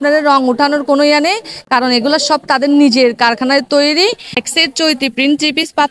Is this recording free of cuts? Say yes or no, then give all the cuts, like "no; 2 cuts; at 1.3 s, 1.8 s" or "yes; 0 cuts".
no; 1 cut; at 4.3 s